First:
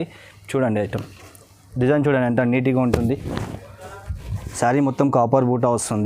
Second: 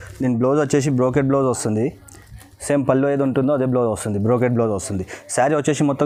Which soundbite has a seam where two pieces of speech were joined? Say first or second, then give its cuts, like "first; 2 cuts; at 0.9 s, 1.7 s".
first; 1 cut; at 4.4 s